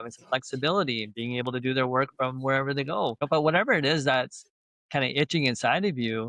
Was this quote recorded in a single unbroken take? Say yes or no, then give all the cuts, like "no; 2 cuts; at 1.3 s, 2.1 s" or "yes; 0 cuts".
no; 1 cut; at 3.3 s